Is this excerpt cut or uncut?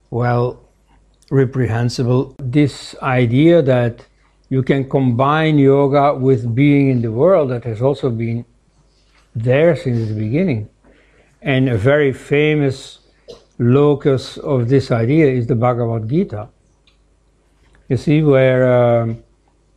cut